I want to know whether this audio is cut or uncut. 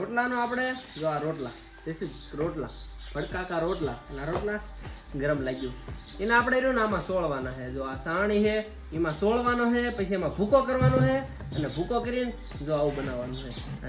uncut